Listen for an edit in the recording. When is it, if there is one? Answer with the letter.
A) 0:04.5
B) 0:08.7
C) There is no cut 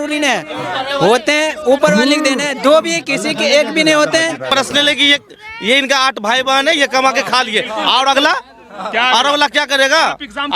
A